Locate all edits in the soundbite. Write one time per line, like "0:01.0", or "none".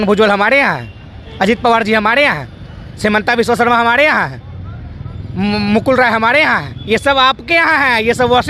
none